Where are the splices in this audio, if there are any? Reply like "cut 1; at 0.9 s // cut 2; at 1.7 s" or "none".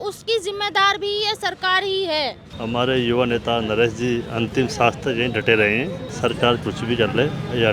cut 1; at 2.5 s // cut 2; at 6.0 s